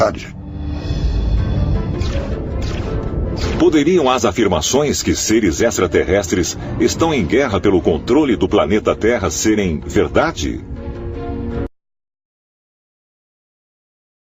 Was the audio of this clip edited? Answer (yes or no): no